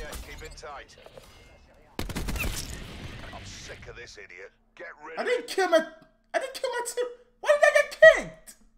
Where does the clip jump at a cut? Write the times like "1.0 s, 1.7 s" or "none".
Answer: none